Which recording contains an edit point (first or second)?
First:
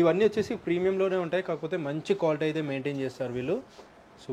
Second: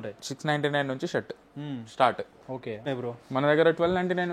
second